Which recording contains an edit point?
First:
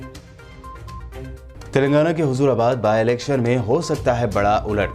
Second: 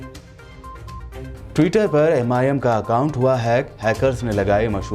first; 1 cut; at 1.2 s

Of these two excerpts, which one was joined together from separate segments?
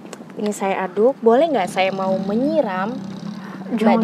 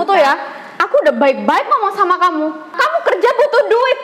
second; 1 cut; at 2.8 s

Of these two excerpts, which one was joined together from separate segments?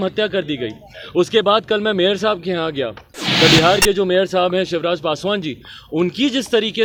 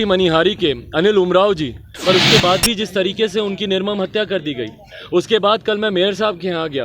second; 1 cut; at 1.9 s

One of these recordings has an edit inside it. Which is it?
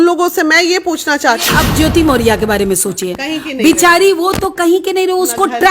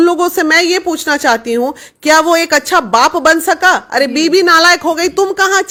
first; 1 cut; at 1.5 s

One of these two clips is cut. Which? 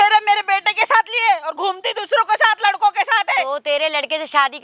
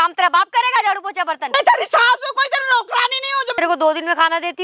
second; 2 cuts; at 1.4 s, 3.5 s

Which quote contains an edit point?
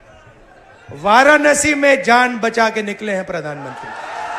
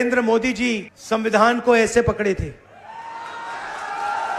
second; 1 cut; at 0.9 s

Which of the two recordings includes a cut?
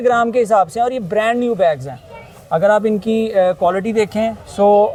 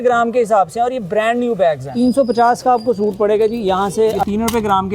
second; 2 cuts; at 1.9 s, 4.2 s

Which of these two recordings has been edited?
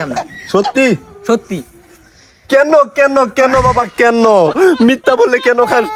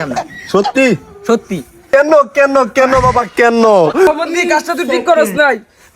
second; 2 cuts; at 1.8 s, 4.1 s

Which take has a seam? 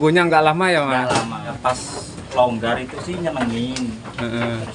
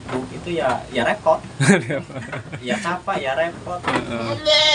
first; 1 cut; at 1.6 s

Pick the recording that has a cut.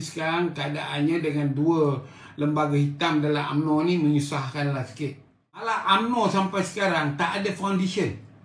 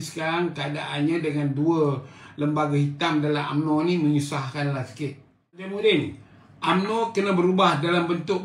first; 1 cut; at 5.7 s

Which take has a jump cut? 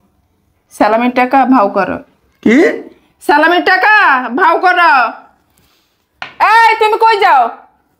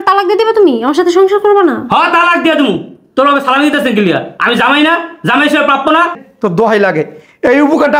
second; 1 cut; at 6.2 s

